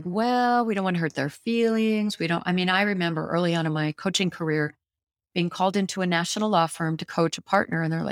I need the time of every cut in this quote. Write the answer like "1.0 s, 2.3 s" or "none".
none